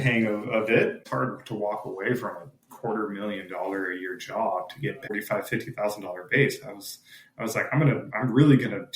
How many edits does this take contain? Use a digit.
2